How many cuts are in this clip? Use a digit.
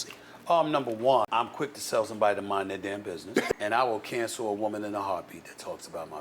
2